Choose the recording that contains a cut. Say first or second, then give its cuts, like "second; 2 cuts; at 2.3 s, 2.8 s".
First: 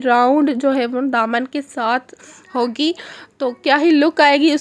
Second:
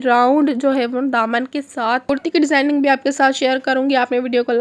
second; 1 cut; at 2.1 s